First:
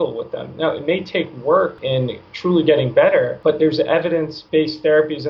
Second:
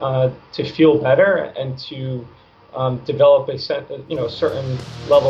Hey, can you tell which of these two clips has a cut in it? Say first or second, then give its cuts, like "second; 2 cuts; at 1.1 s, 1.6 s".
first; 3 cuts; at 1.8 s, 3.4 s, 4.4 s